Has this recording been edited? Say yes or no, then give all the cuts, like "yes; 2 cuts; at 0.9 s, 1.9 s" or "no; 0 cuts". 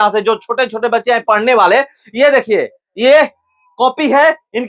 no; 0 cuts